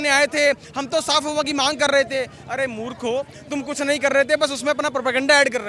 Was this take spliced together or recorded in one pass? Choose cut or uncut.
uncut